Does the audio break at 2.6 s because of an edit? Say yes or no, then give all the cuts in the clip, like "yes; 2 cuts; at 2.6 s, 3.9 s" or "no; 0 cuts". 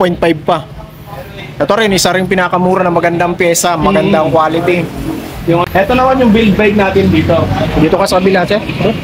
no; 1 cut; at 5.6 s